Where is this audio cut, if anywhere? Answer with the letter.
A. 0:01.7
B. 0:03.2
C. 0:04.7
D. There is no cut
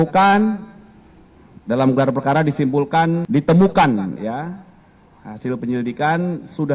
B